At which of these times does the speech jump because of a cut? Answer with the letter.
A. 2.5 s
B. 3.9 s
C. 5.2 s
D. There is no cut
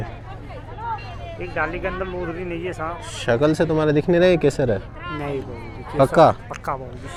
D